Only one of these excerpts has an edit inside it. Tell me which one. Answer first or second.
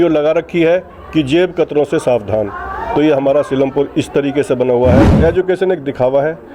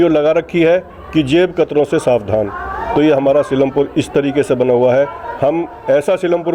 first